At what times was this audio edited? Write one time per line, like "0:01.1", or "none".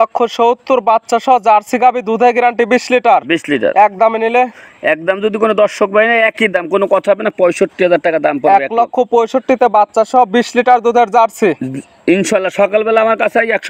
none

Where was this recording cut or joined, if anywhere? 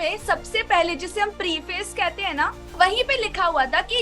0:02.7

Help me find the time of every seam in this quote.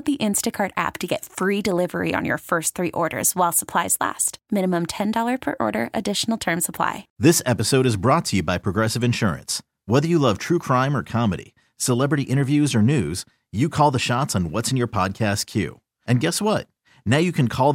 0:07.0

